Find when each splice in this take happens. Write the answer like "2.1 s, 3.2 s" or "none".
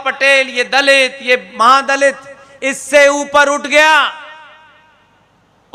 none